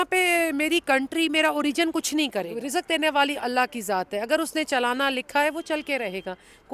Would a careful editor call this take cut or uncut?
cut